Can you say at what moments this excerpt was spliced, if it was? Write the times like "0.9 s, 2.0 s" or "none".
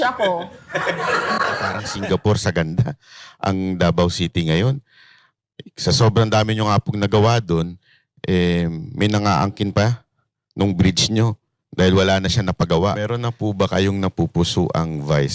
1.9 s, 13.0 s